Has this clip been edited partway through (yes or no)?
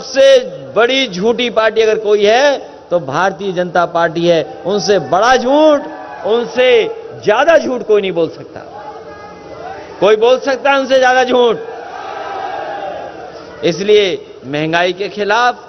no